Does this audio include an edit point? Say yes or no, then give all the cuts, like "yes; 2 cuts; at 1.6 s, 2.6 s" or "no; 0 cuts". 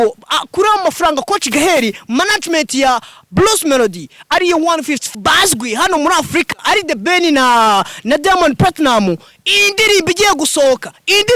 yes; 1 cut; at 5.0 s